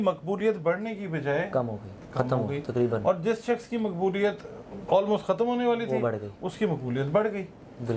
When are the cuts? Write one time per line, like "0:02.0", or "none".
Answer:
none